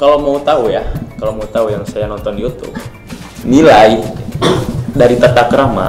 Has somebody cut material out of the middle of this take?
yes; 1 cut; at 3.3 s

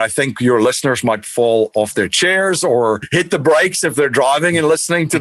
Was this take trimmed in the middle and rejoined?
yes; 1 cut; at 3.0 s

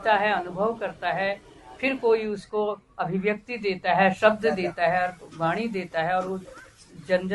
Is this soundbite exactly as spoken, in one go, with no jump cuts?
yes; 0 cuts

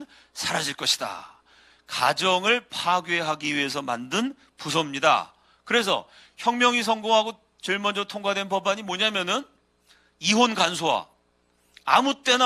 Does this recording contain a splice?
no; 0 cuts

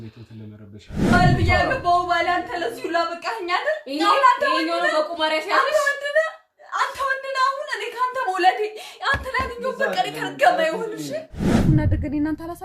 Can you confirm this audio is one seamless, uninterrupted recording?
no; 2 cuts; at 1.0 s, 11.5 s

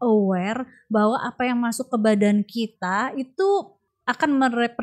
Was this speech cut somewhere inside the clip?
yes; 1 cut; at 3.8 s

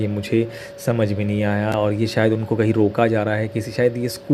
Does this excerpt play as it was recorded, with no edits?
yes; 0 cuts

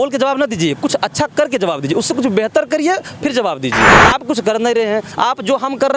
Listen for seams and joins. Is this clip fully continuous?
no; 1 cut; at 3.9 s

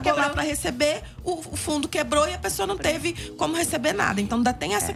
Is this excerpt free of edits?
yes; 0 cuts

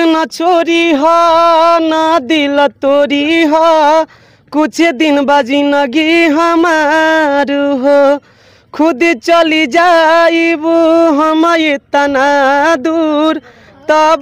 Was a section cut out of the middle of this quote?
no; 0 cuts

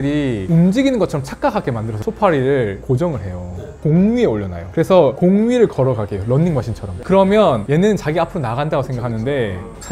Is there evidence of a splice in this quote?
yes; 3 cuts; at 2.0 s, 3.8 s, 6.9 s

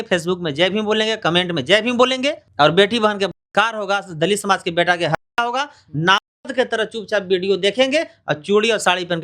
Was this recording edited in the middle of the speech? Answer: yes; 1 cut; at 2.4 s

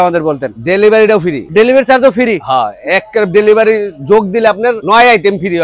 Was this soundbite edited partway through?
no; 0 cuts

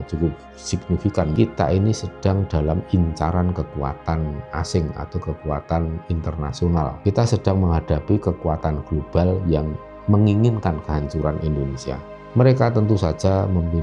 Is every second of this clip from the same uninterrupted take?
no; 1 cut; at 1.3 s

